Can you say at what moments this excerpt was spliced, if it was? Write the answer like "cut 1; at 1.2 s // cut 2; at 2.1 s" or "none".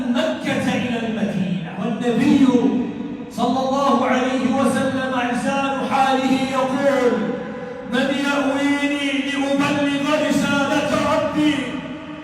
cut 1; at 1.7 s

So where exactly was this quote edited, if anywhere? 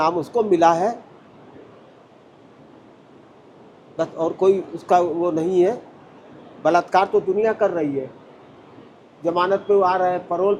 none

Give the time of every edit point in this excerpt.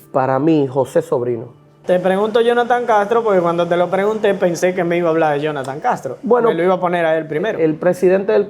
cut 1; at 1.8 s // cut 2; at 7.5 s

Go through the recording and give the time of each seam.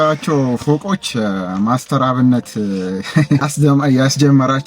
cut 1; at 3.5 s

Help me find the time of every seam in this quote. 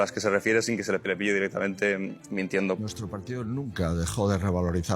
cut 1; at 1.0 s // cut 2; at 2.8 s

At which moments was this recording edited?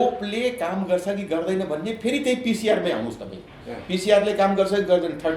none

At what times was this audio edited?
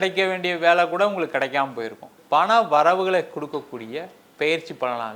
cut 1; at 2.1 s

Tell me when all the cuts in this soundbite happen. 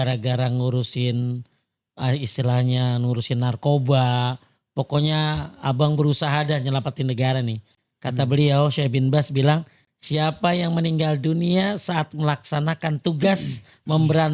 none

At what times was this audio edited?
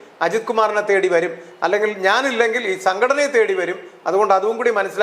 none

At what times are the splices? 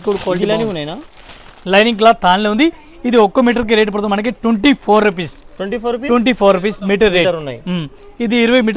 none

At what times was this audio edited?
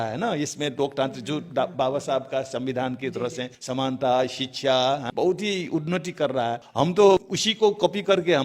cut 1; at 3.5 s // cut 2; at 5.1 s // cut 3; at 6.6 s // cut 4; at 7.4 s

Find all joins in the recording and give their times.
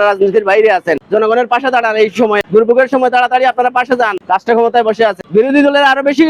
cut 1; at 1.0 s // cut 2; at 2.4 s // cut 3; at 4.2 s // cut 4; at 5.2 s

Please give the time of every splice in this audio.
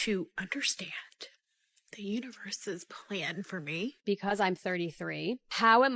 cut 1; at 4.0 s

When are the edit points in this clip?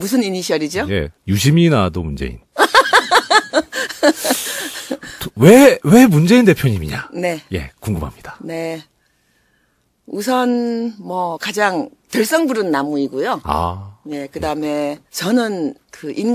none

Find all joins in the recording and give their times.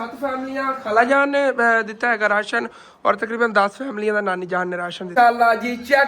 cut 1; at 5.0 s

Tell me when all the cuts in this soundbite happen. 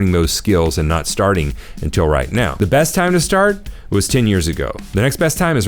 cut 1; at 2.5 s

